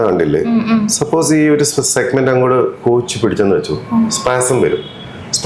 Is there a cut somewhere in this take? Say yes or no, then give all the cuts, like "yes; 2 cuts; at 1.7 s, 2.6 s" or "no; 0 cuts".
no; 0 cuts